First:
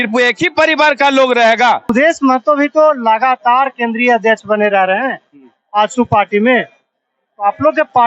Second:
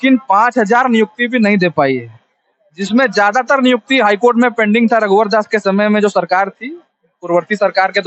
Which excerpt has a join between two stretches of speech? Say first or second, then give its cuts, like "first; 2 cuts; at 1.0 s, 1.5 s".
first; 1 cut; at 1.9 s